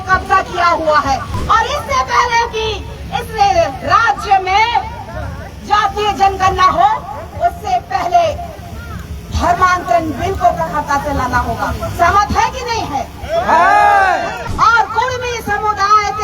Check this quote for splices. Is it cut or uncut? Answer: cut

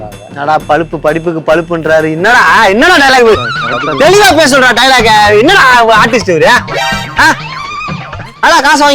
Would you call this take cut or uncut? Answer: uncut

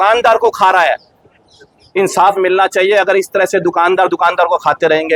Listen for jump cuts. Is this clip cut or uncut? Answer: uncut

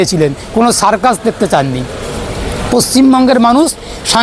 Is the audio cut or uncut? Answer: uncut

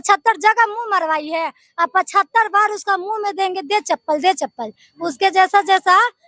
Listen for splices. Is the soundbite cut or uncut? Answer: uncut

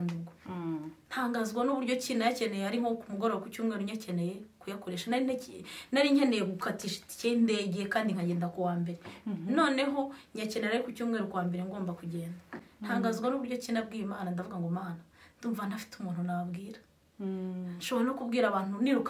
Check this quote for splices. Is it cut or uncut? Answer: uncut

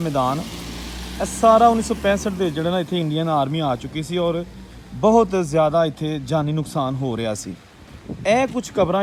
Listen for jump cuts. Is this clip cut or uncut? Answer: uncut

